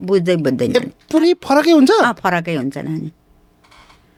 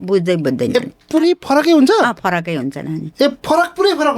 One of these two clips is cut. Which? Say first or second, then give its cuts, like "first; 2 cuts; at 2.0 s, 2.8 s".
second; 1 cut; at 3.0 s